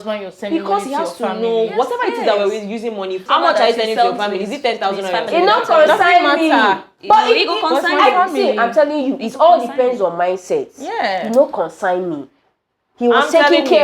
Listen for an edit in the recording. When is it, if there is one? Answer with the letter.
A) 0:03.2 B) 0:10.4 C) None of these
A